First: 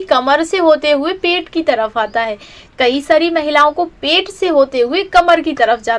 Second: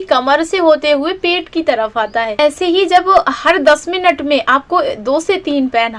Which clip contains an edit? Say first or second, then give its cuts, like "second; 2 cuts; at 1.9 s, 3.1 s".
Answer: second; 1 cut; at 2.3 s